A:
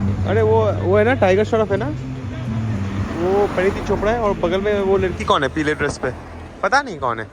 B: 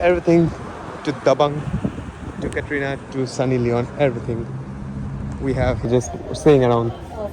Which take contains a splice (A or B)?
B